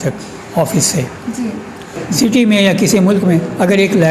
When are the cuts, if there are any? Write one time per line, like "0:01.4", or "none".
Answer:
0:02.1